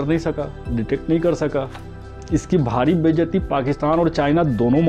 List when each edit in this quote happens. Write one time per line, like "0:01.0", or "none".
none